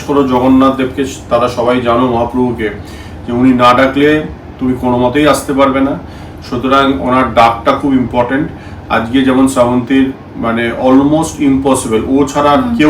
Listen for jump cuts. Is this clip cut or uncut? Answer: uncut